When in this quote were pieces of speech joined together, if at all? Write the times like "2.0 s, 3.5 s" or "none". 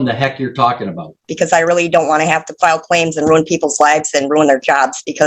1.3 s